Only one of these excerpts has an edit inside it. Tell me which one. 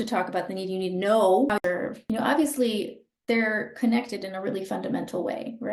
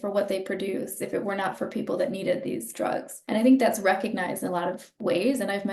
first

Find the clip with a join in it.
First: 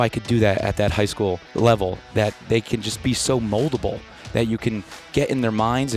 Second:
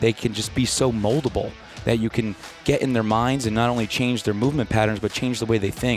first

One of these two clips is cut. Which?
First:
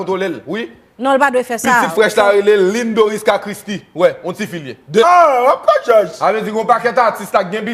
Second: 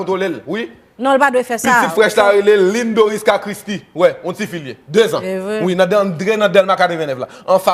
second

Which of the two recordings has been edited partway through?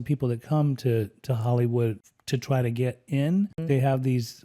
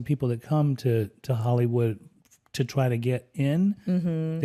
first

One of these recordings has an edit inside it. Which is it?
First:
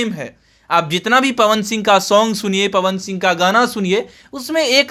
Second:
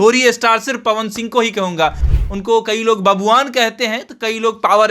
second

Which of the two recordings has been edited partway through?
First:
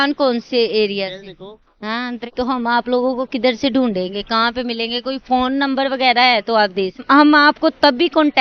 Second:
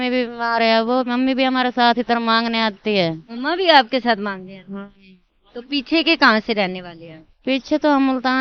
first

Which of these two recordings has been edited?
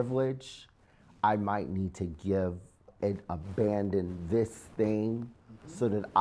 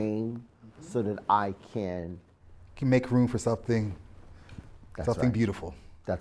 first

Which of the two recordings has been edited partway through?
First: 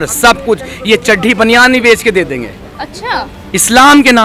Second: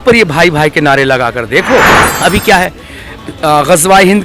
second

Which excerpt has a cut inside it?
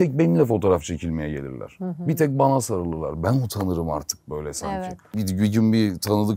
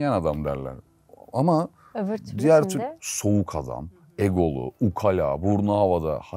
first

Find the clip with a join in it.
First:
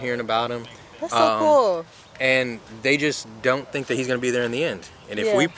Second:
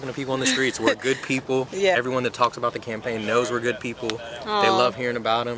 second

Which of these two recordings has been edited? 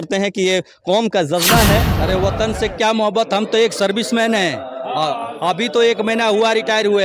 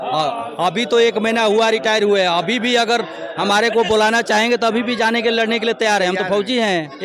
first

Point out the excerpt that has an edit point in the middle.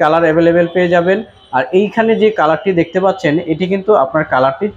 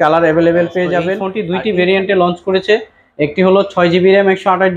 second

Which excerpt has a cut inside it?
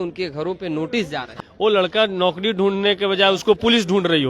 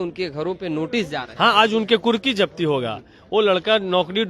first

